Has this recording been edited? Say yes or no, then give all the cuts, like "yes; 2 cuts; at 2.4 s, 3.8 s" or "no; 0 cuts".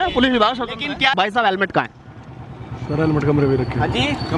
yes; 1 cut; at 1.2 s